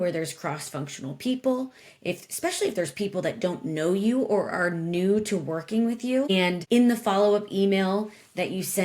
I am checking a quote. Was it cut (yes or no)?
yes